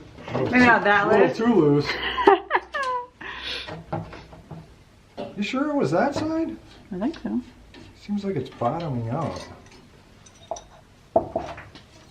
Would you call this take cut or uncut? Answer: uncut